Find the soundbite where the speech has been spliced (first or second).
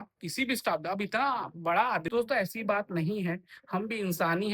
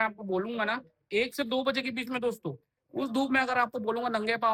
first